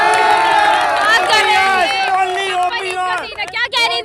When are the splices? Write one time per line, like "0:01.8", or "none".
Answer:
none